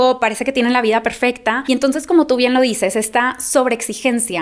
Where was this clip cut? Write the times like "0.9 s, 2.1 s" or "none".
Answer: none

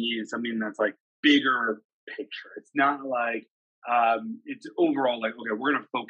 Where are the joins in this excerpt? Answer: 1.1 s

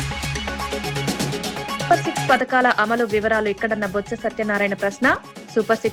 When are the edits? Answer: 1.9 s

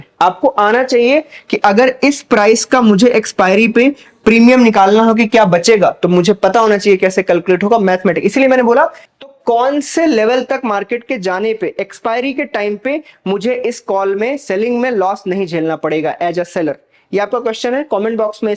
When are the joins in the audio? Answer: 9.0 s

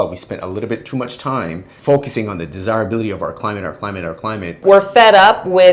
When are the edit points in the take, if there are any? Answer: 1.7 s, 4.6 s

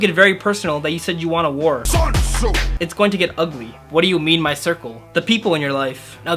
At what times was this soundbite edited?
none

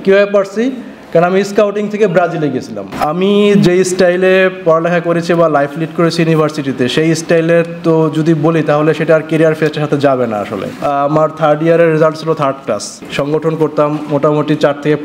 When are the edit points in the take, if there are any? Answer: 2.9 s, 10.8 s, 13.0 s

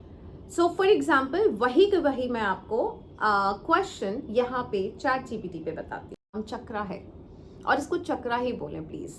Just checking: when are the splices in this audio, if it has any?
6.3 s

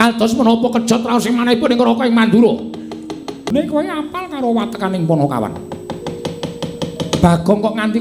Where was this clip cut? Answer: 3.5 s

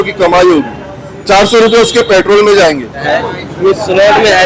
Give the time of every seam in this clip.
3.0 s

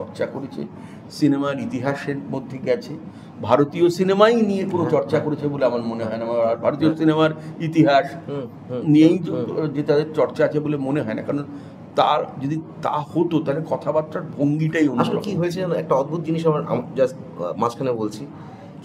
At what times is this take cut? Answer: none

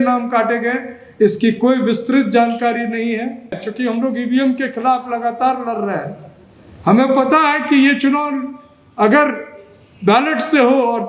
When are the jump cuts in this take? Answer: 3.6 s

